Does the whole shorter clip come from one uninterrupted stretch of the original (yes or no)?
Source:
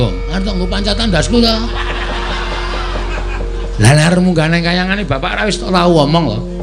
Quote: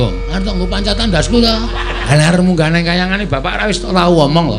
no